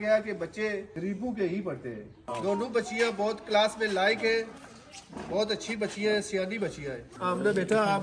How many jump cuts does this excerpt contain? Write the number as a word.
three